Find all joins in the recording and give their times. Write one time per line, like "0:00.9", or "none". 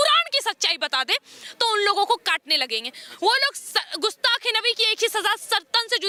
none